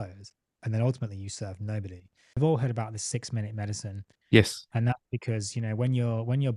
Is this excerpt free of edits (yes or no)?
no